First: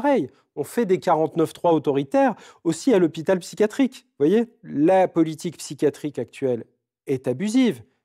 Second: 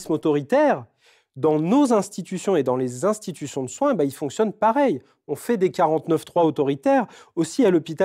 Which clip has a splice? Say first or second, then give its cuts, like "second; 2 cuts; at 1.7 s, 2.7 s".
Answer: first; 1 cut; at 4.6 s